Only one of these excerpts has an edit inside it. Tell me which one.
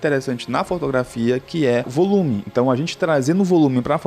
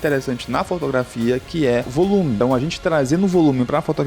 second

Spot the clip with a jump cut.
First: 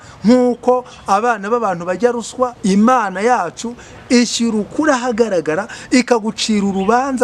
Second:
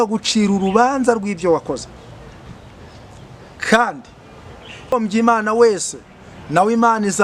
second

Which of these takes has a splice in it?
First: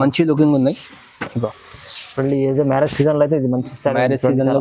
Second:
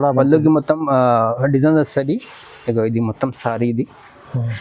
first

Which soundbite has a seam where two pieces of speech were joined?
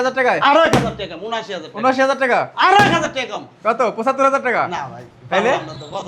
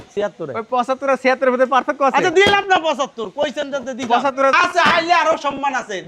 second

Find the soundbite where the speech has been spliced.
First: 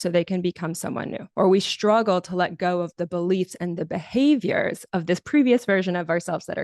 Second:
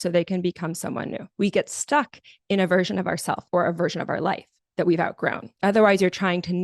second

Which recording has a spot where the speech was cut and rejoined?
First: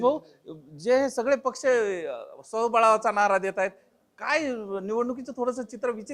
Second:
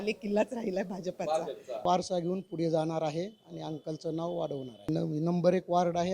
second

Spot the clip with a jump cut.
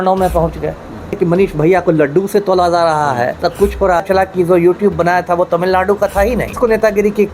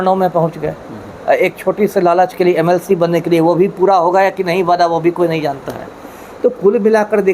first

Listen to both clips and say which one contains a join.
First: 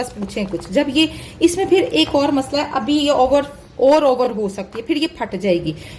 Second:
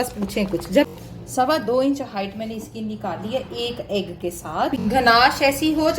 second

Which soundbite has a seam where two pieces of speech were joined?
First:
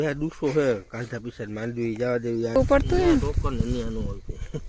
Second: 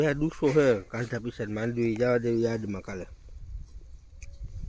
first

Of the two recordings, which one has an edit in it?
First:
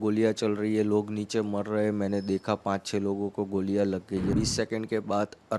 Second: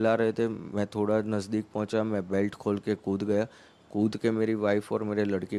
first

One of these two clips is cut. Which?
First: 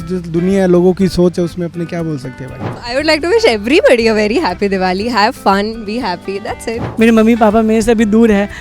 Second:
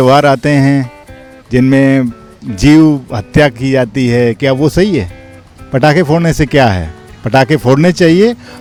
first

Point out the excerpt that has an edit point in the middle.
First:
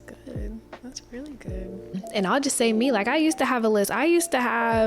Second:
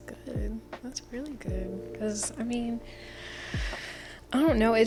first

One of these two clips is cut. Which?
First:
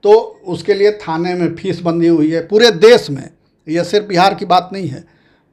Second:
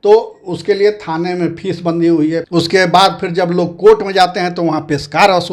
second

